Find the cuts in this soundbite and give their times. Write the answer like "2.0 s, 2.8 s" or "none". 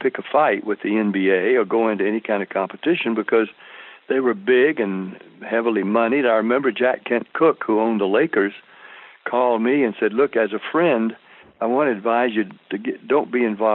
none